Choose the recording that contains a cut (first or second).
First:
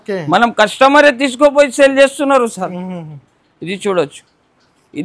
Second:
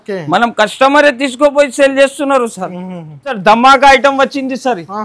second